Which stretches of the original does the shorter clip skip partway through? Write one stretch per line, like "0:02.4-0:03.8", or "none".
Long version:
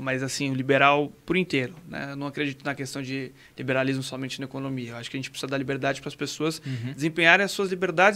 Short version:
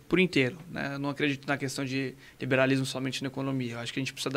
none

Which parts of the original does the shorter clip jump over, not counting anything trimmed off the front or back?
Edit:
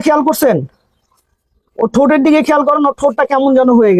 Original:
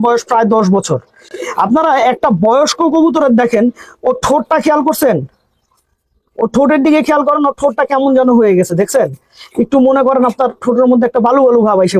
none

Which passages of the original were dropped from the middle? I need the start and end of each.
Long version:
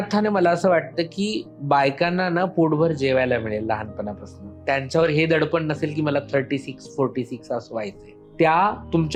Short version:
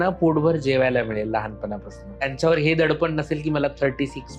0:04.6-0:04.7

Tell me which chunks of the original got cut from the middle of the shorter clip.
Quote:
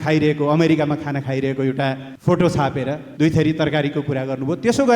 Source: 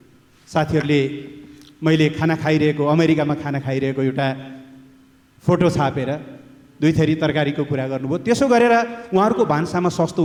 0:04.5-0:05.3
0:06.2-0:06.6

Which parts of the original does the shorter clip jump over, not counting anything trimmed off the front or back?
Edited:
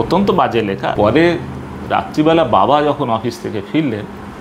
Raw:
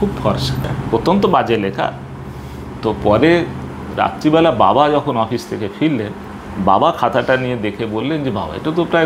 0:01.9-0:03.0

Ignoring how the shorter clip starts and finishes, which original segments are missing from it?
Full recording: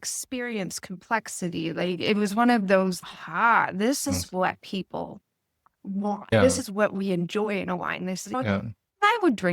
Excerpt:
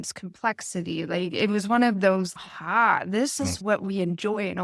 0:04.3-0:06.7

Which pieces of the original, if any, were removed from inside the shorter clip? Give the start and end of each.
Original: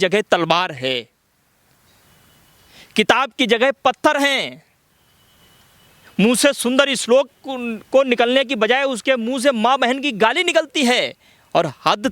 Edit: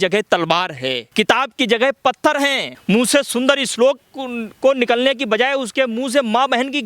0:01.0-0:02.8
0:04.5-0:06.0

